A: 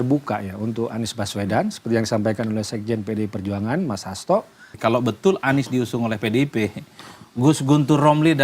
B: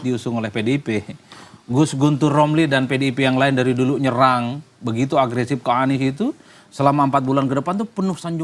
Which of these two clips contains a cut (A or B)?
A